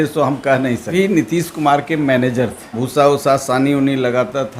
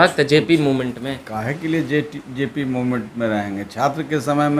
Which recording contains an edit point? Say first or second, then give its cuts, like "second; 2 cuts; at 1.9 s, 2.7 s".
first; 2 cuts; at 0.9 s, 2.8 s